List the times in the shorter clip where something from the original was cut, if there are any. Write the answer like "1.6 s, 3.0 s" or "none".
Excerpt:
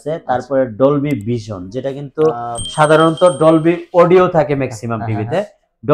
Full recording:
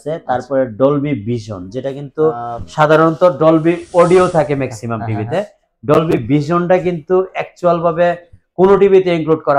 none

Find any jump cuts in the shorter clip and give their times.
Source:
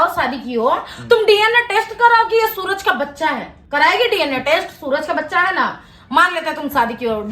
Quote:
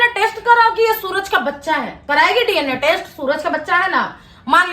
1.9 s

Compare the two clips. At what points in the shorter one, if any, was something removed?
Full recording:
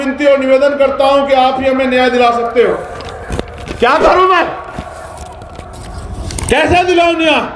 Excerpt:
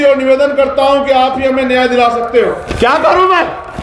2.7 s

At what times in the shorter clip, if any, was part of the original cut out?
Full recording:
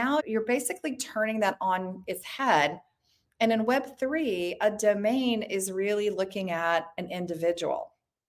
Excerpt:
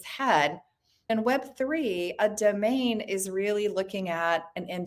1.1 s

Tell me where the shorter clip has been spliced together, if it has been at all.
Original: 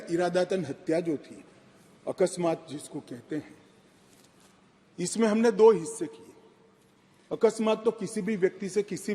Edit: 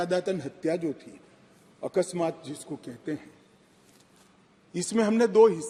none

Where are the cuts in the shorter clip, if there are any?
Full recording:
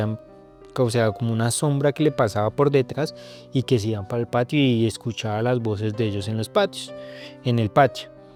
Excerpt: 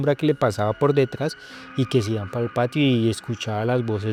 none

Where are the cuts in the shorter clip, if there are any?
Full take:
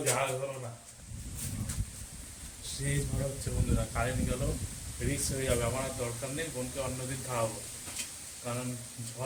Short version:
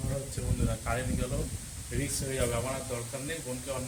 none

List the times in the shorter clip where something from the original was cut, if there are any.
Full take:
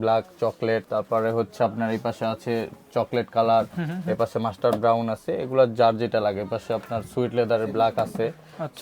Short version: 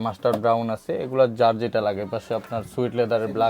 none

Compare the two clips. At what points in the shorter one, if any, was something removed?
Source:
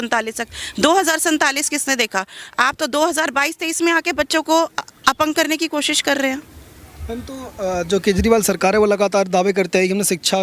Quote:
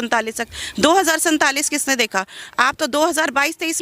none

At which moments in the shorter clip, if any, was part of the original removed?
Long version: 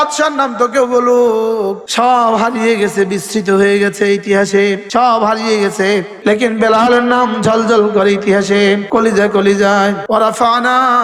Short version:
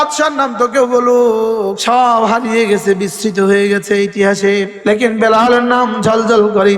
1.8 s, 4.7 s

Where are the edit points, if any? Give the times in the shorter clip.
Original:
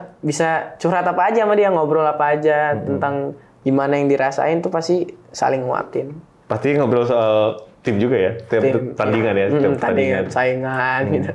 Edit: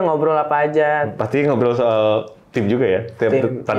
1.1 s

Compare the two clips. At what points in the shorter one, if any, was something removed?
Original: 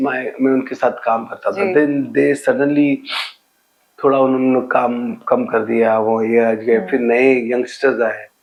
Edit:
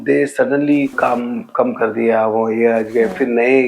0.9 s

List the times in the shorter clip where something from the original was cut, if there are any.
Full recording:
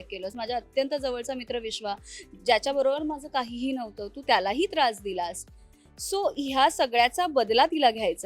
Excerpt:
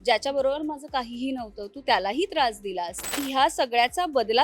3.2 s

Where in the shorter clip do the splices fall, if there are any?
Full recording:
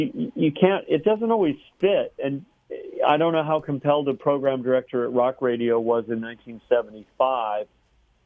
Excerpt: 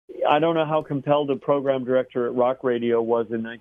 none

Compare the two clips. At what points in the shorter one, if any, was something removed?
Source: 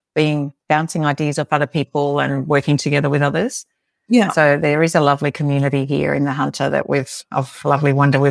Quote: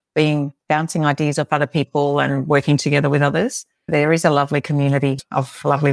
3.9 s, 5.2 s

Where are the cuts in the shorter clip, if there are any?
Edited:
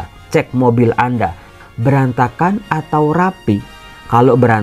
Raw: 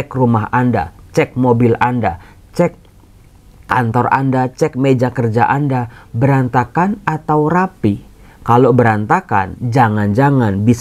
1.6 s

